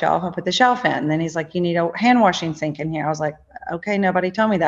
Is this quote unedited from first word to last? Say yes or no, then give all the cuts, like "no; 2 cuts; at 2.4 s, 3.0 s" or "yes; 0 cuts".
yes; 0 cuts